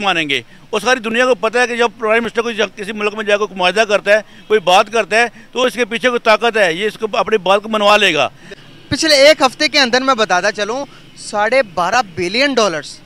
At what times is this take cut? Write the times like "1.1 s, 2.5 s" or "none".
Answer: 8.5 s